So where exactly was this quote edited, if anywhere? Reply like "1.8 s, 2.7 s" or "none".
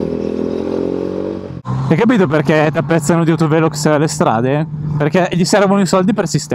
1.6 s